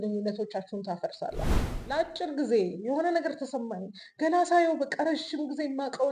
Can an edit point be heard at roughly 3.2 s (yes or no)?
no